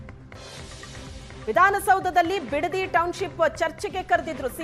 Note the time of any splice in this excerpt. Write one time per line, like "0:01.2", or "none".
0:01.5